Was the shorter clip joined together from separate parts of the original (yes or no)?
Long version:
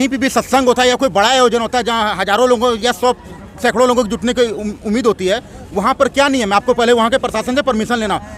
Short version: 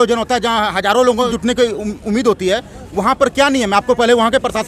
yes